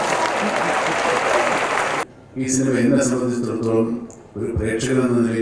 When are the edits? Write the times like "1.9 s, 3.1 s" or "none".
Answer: 2.0 s

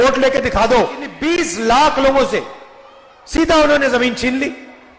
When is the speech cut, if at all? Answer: 1.1 s

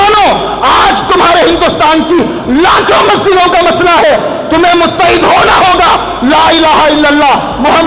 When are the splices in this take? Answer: none

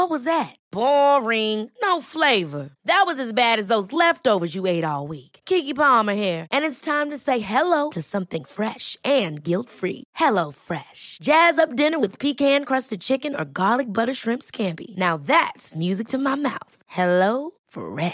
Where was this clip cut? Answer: none

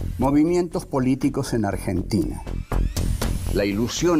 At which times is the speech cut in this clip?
none

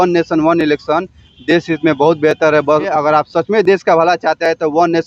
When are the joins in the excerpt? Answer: 2.9 s

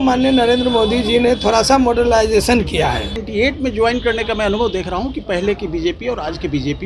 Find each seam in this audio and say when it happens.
3.2 s

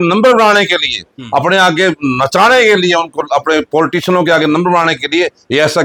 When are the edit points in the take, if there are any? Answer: none

